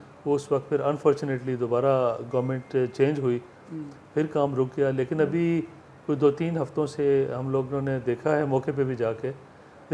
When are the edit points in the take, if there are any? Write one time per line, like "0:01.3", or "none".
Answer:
none

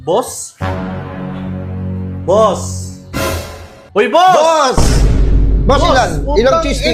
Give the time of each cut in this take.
none

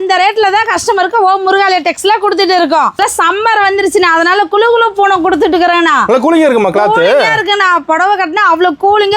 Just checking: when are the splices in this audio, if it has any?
0:03.0

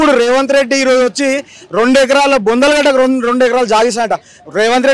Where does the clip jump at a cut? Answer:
none

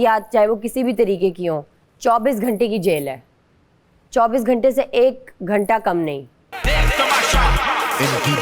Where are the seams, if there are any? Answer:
0:06.5

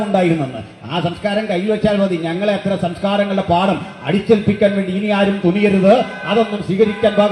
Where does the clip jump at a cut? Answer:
none

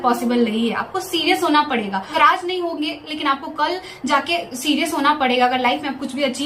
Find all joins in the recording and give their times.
none

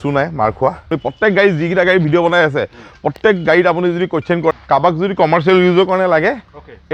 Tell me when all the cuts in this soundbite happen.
0:00.9
0:04.5

